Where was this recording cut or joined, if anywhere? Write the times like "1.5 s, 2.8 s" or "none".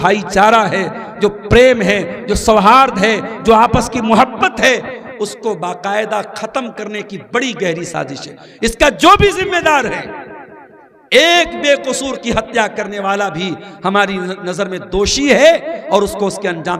none